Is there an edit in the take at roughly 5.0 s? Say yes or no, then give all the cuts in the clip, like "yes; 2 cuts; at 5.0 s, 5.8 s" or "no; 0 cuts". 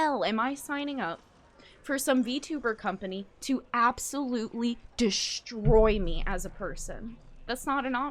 no; 0 cuts